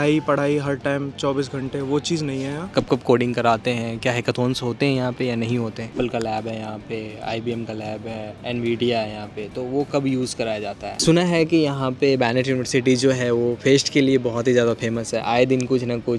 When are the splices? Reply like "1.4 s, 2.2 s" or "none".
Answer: 2.7 s, 5.9 s, 8.3 s, 10.9 s